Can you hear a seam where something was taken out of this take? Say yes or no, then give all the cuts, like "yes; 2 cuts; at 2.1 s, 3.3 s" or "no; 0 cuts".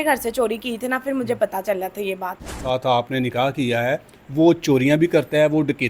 yes; 1 cut; at 2.6 s